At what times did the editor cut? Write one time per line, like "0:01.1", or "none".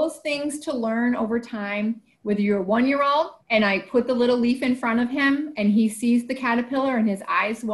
0:03.4